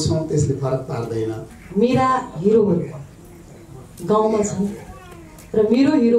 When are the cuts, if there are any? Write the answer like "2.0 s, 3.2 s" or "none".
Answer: 1.5 s